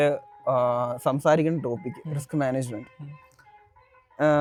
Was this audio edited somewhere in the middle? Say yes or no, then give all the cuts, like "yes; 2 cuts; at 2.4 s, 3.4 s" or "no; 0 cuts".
no; 0 cuts